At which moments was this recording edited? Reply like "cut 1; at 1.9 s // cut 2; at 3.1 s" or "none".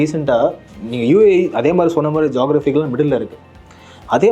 none